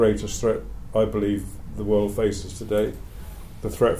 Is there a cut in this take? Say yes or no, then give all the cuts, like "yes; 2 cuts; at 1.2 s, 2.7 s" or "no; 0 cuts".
no; 0 cuts